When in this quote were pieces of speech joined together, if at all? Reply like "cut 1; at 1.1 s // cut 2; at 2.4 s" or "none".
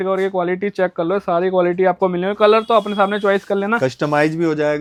none